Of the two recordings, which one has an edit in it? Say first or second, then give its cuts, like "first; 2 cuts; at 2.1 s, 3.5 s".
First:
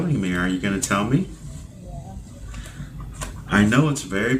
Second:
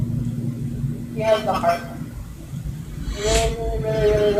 first; 1 cut; at 1.5 s